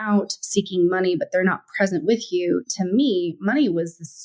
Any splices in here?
no; 0 cuts

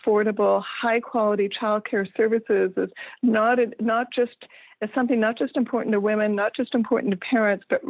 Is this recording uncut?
yes; 0 cuts

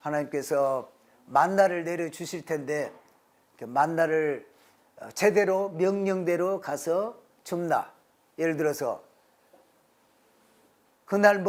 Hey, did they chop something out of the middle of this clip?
no; 0 cuts

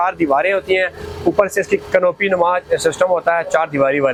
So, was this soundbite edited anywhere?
no; 0 cuts

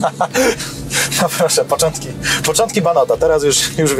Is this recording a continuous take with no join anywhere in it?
yes; 0 cuts

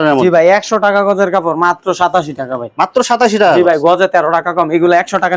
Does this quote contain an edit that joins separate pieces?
no; 0 cuts

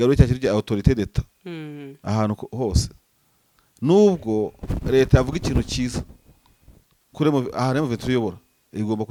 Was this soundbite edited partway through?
no; 0 cuts

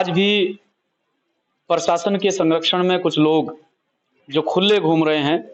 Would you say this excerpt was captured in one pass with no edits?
yes; 0 cuts

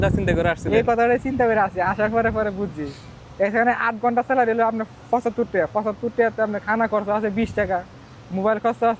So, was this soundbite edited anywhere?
no; 0 cuts

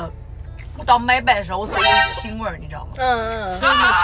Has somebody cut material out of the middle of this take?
no; 0 cuts

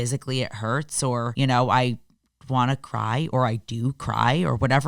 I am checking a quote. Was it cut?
yes; 1 cut; at 1.3 s

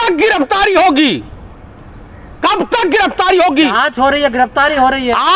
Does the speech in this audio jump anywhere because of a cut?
no; 0 cuts

